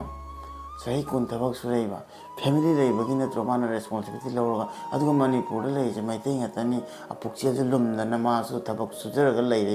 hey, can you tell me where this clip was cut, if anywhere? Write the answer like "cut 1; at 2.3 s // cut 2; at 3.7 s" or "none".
none